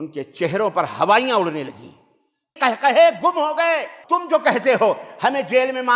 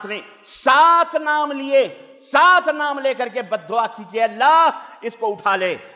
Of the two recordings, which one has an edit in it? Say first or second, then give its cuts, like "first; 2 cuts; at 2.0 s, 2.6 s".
first; 2 cuts; at 2.5 s, 3.9 s